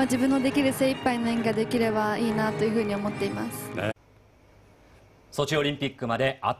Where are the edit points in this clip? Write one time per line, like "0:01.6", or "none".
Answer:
none